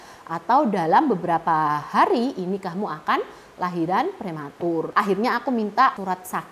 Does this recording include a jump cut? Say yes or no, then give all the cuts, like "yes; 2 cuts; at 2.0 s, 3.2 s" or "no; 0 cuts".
no; 0 cuts